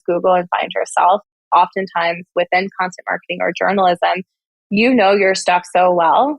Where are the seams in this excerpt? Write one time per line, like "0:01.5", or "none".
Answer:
0:01.5